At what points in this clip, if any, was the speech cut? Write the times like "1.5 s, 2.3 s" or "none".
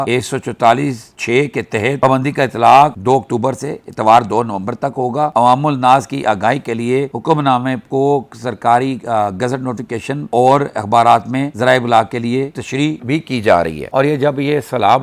2.0 s, 13.8 s